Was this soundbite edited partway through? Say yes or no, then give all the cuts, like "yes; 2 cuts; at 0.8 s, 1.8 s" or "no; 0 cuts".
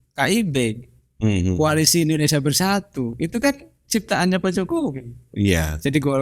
no; 0 cuts